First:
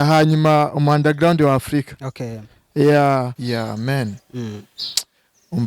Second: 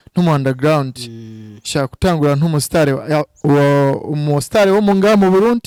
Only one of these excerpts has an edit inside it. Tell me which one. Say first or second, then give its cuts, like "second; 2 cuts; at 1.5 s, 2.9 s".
first; 1 cut; at 3.4 s